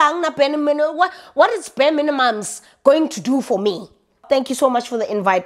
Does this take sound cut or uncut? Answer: cut